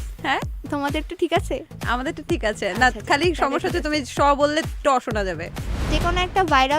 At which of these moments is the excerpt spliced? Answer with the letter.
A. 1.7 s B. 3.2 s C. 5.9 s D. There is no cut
C